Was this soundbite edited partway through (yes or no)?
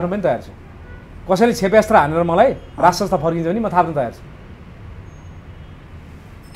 no